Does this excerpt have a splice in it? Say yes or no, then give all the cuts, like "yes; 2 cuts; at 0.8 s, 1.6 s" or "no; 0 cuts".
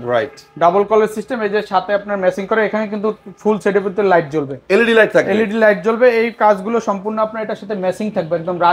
no; 0 cuts